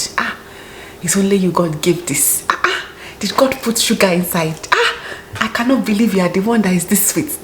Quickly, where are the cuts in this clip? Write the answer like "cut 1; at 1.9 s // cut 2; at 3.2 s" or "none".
none